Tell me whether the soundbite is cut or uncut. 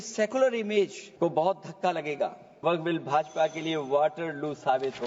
cut